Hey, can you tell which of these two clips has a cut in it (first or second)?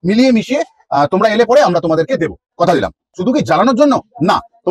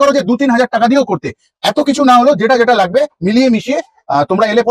first